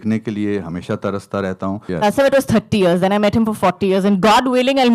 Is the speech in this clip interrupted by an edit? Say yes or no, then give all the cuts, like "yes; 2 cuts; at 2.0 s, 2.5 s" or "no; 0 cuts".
yes; 1 cut; at 1.8 s